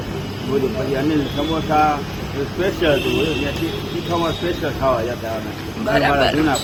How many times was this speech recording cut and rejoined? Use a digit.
0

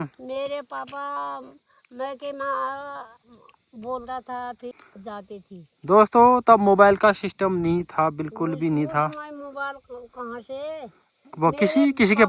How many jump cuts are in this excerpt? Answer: 1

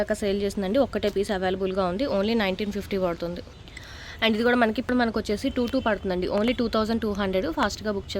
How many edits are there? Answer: 1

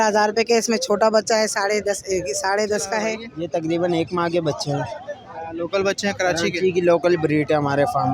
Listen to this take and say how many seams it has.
1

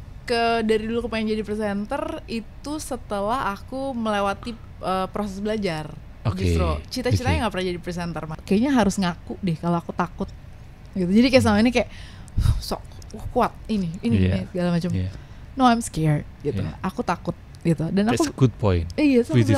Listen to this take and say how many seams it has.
1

